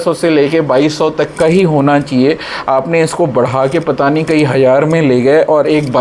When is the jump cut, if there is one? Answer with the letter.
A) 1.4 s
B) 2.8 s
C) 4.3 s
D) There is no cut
D